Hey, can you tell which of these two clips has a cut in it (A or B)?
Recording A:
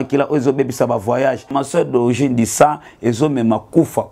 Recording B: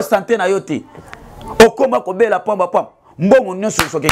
A